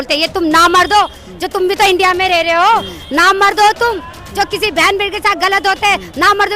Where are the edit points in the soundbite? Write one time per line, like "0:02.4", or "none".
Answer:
none

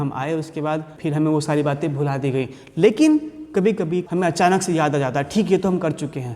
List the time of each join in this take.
0:00.9
0:04.1

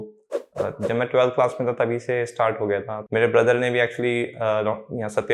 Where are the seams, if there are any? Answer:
0:03.0

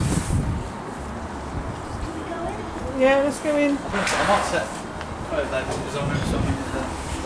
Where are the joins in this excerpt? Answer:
none

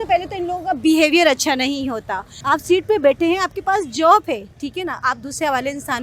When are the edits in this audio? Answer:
0:02.3

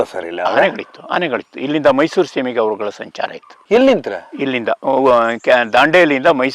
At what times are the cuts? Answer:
none

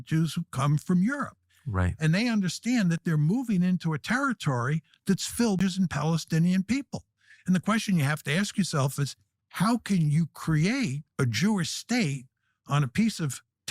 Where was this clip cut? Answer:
0:05.6

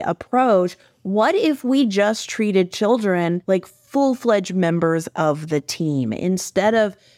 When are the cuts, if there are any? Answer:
0:03.4

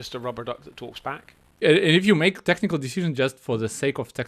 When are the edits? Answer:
0:01.6

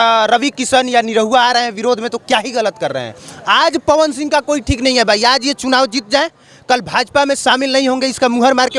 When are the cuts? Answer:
none

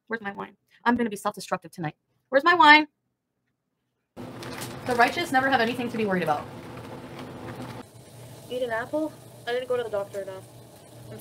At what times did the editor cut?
0:04.2
0:07.7

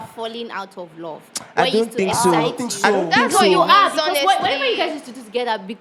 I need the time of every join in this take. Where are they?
none

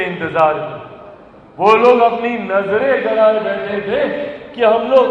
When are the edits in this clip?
none

